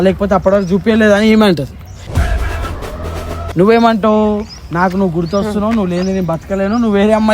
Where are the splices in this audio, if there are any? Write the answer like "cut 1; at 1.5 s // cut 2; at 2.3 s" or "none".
cut 1; at 3.5 s